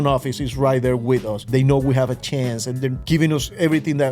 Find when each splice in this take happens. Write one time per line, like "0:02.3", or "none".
0:01.5
0:03.0

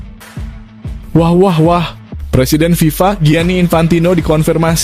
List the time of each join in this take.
0:01.1

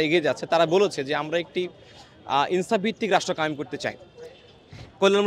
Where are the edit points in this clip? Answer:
none

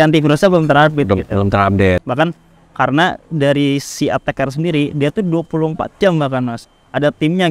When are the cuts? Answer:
0:02.0

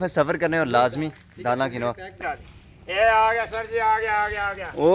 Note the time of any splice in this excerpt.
0:02.2

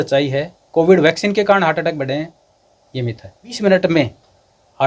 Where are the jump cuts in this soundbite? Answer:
0:03.6

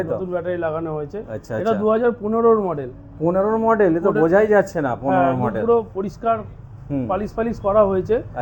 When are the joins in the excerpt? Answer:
none

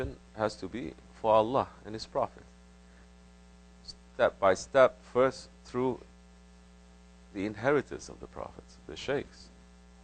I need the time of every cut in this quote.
0:02.0

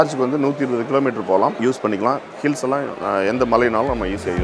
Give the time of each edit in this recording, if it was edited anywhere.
0:01.6

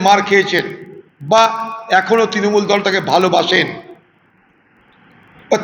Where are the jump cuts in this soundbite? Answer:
none

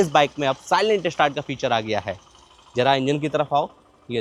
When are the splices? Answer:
none

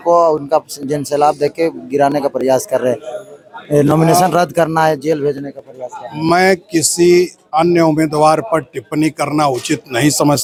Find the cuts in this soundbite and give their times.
none

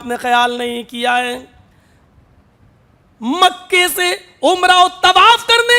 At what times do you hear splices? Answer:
none

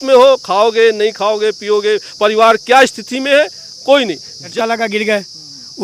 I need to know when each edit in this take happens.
0:04.5

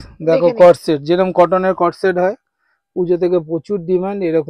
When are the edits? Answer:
none

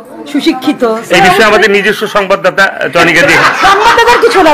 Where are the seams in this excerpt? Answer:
0:03.4

